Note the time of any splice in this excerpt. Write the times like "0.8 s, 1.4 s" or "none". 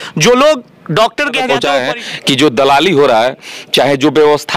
1.5 s